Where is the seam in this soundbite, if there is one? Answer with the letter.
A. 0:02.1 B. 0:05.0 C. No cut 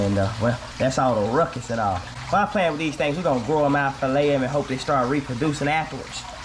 C